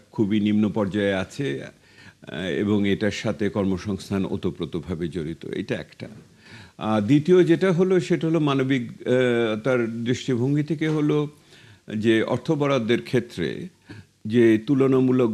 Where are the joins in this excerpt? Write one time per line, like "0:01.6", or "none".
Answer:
none